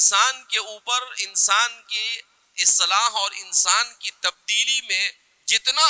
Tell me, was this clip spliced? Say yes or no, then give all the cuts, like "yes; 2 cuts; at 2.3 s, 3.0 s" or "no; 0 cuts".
no; 0 cuts